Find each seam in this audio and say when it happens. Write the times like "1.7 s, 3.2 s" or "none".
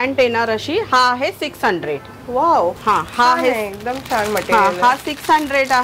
none